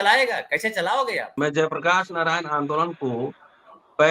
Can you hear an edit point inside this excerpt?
yes; 1 cut; at 1.3 s

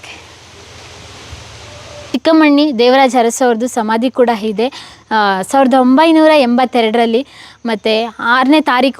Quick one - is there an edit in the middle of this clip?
yes; 1 cut; at 2.0 s

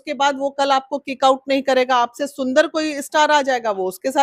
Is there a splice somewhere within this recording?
no; 0 cuts

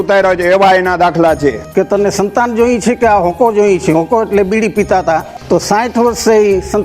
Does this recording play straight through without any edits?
no; 2 cuts; at 1.6 s, 5.3 s

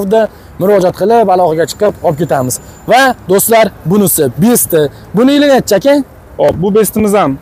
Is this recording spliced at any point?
no; 0 cuts

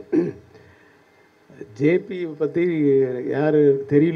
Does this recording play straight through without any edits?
yes; 0 cuts

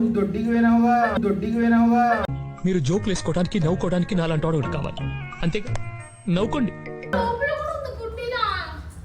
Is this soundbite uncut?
yes; 0 cuts

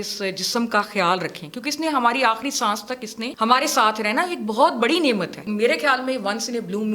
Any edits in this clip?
yes; 2 cuts; at 3.2 s, 5.4 s

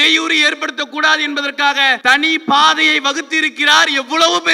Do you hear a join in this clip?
yes; 1 cut; at 2.0 s

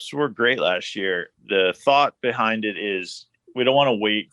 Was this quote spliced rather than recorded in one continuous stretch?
yes; 2 cuts; at 1.3 s, 3.4 s

